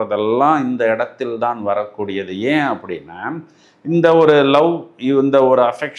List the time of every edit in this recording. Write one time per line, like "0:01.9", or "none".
none